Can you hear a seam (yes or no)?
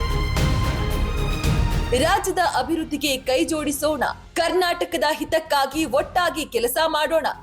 yes